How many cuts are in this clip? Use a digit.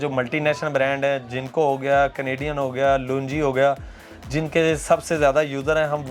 0